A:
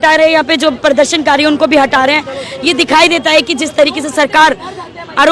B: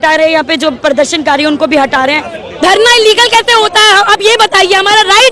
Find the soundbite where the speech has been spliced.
B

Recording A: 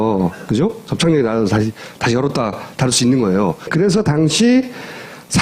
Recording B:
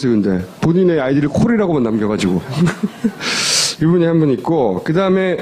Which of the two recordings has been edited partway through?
A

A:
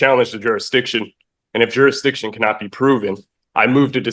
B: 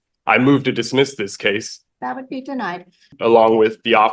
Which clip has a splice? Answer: B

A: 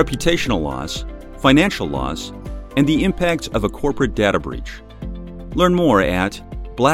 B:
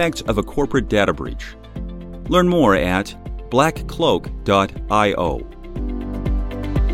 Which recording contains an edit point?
B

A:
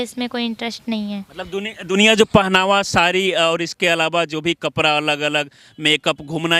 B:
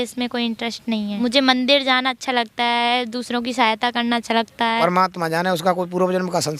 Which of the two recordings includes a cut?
B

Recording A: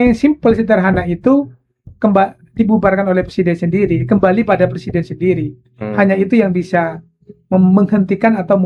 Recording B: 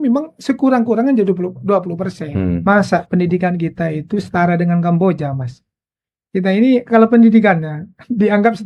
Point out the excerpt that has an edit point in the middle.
B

